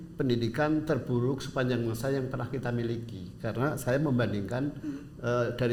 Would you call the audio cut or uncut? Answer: uncut